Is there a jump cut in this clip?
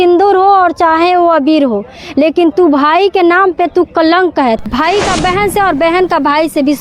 yes; 1 cut; at 4.6 s

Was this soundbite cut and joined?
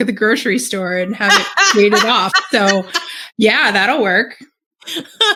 no; 0 cuts

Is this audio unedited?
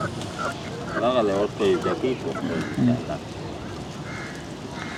yes; 0 cuts

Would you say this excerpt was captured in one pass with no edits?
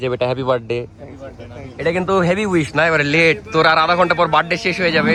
yes; 0 cuts

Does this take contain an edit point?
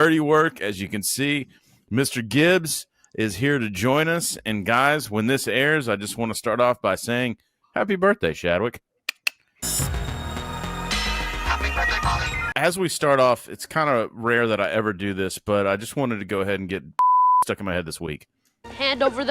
yes; 1 cut; at 12.4 s

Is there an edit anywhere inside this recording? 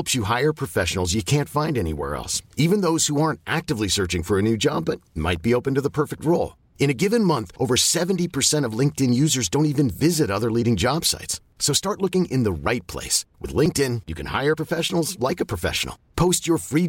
no; 0 cuts

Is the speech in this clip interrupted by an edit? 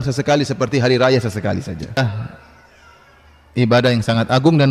yes; 1 cut; at 2.0 s

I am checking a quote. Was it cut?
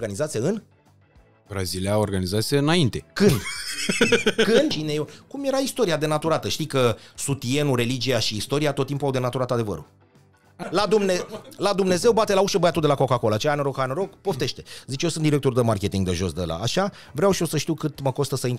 yes; 2 cuts; at 4.8 s, 10.5 s

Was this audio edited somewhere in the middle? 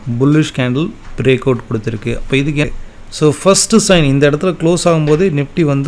yes; 1 cut; at 2.6 s

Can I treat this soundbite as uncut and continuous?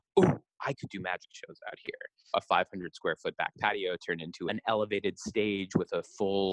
no; 1 cut; at 2.3 s

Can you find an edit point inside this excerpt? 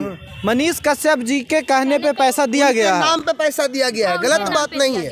no; 0 cuts

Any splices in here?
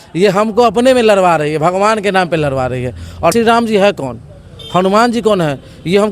yes; 1 cut; at 3.3 s

